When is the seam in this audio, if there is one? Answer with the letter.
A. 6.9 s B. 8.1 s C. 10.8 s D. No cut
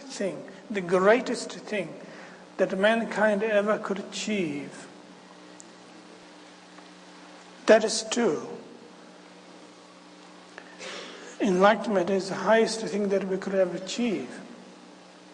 A